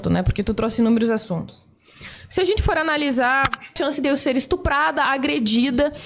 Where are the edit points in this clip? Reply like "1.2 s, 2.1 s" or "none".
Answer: 3.7 s

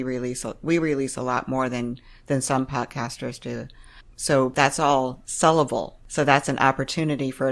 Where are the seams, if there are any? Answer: 4.5 s, 6.0 s

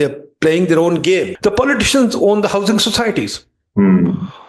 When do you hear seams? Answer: 1.3 s

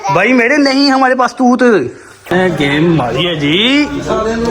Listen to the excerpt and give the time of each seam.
2.3 s

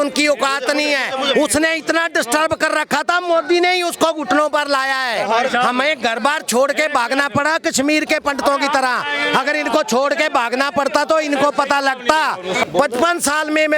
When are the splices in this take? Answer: 12.6 s

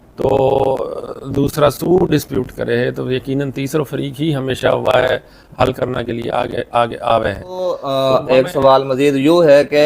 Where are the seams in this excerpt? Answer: 7.8 s

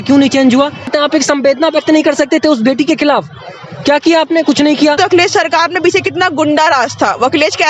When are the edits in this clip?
0.9 s, 5.0 s

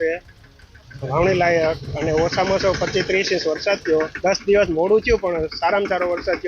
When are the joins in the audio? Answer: 4.1 s

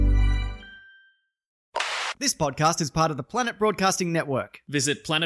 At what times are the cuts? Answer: 1.6 s

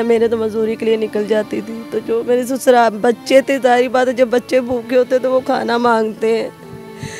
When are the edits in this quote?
none

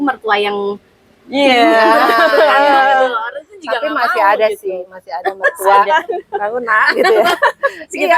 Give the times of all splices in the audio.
5.9 s

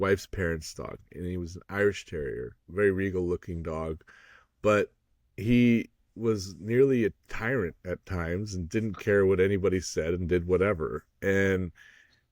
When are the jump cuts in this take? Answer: 2.6 s

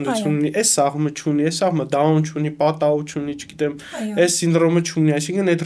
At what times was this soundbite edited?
none

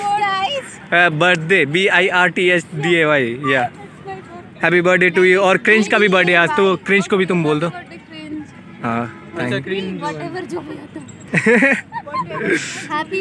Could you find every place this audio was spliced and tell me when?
none

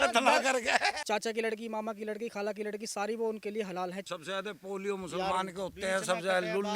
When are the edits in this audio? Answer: 1.0 s, 4.1 s

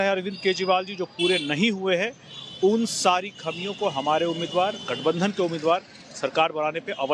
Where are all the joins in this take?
none

